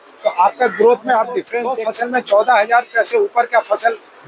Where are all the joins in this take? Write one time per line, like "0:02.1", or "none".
0:01.6